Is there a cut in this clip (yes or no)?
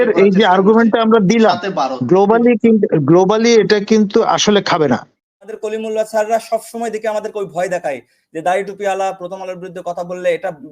yes